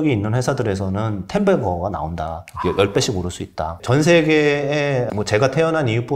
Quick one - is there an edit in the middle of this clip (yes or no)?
yes